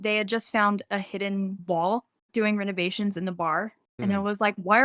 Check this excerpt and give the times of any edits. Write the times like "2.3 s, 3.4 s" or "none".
1.6 s, 3.9 s

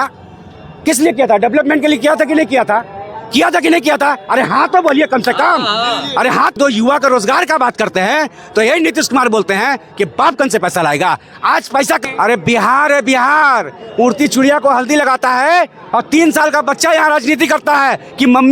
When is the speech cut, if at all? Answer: 6.5 s, 12.0 s

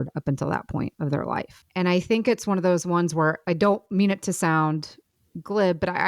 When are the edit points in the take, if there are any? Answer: 1.6 s, 3.4 s

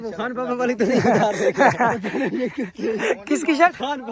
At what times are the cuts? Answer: none

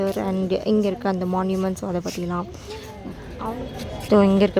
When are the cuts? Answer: 3.2 s

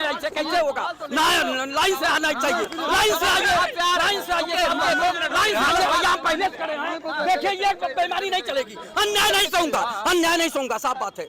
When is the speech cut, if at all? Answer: none

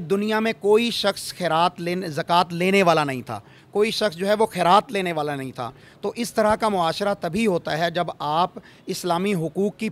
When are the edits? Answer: none

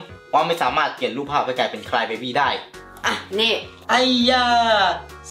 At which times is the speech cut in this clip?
3.7 s

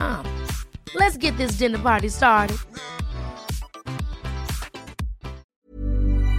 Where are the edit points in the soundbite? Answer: 5.5 s

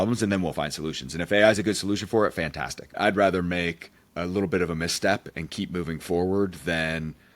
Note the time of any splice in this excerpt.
3.0 s

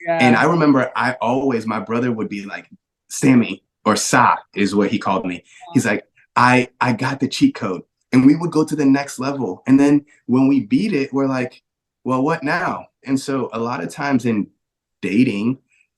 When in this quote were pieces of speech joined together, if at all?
13.0 s

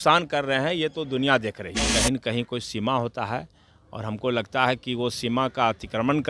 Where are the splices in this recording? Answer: 1.9 s

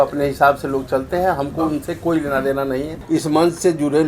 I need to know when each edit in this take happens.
2.9 s

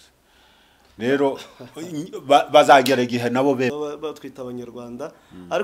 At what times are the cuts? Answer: 3.7 s

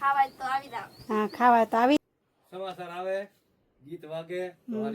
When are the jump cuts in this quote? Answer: 2.0 s

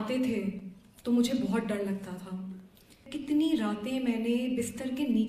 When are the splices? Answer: 3.1 s

